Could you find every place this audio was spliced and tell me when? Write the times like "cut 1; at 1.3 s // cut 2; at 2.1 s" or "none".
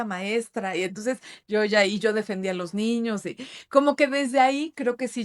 none